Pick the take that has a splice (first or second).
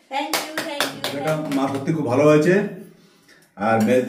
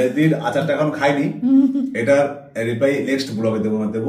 first